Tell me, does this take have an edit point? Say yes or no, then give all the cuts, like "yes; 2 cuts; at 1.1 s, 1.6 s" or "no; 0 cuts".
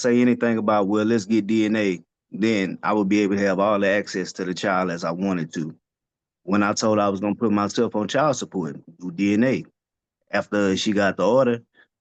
no; 0 cuts